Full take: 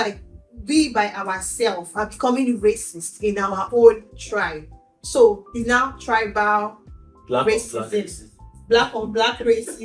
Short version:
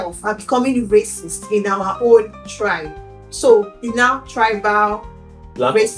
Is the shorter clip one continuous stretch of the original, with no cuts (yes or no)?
yes